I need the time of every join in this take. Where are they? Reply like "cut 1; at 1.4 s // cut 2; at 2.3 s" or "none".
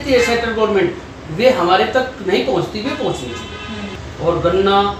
cut 1; at 3.9 s